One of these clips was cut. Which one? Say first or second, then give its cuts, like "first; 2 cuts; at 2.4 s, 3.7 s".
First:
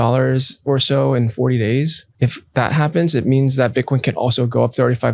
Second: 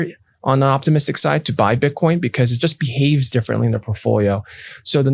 first; 1 cut; at 2.0 s